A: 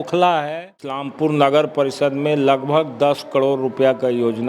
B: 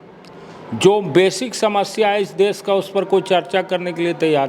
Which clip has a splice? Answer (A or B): A